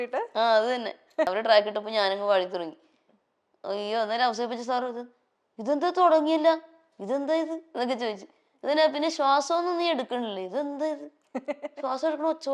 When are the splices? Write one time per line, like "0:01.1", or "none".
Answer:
0:01.3